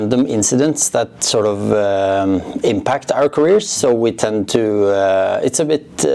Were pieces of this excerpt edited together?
no; 0 cuts

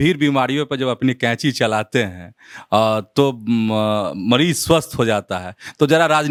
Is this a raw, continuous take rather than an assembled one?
yes; 0 cuts

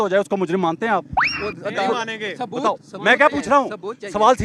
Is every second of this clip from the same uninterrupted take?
yes; 0 cuts

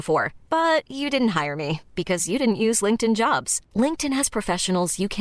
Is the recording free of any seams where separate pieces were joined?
yes; 0 cuts

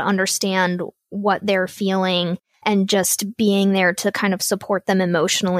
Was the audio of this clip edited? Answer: yes; 1 cut; at 2.5 s

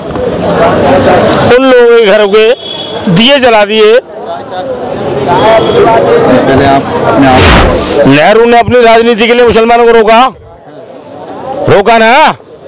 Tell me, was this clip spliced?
yes; 1 cut; at 7.4 s

